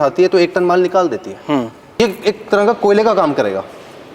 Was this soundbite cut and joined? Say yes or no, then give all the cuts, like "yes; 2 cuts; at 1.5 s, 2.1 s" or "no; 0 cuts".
yes; 1 cut; at 2.0 s